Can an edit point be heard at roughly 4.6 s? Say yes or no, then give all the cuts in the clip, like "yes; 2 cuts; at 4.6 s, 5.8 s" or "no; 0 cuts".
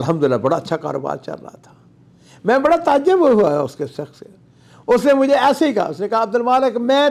no; 0 cuts